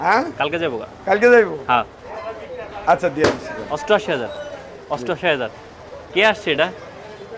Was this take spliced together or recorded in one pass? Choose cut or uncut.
uncut